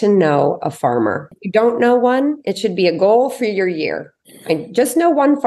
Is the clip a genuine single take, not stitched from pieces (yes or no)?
no